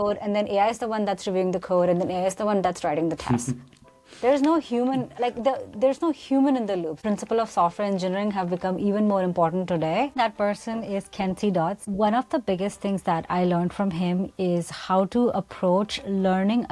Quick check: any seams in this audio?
yes; 3 cuts; at 7.0 s, 10.2 s, 11.9 s

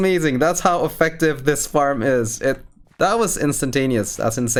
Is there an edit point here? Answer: no; 0 cuts

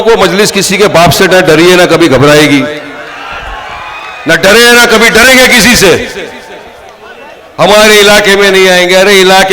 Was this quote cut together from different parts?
yes; 1 cut; at 7.5 s

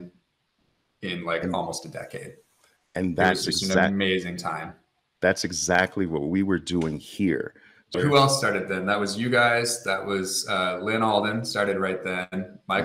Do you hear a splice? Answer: yes; 1 cut; at 8.0 s

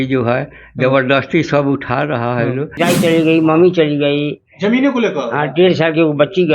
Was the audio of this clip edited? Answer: yes; 1 cut; at 2.7 s

